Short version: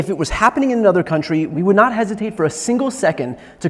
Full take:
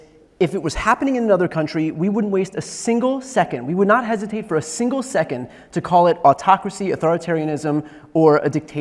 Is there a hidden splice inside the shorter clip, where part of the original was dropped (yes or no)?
yes